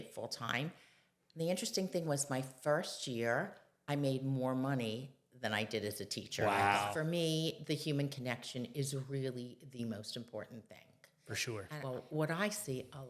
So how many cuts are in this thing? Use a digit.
2